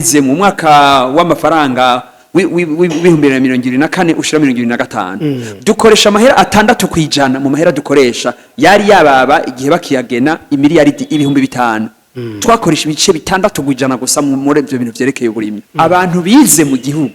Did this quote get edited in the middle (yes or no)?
yes